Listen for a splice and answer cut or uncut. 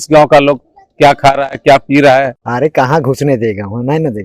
cut